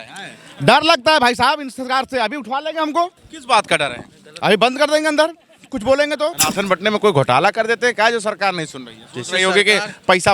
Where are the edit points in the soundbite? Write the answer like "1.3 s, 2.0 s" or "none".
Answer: 3.3 s, 6.4 s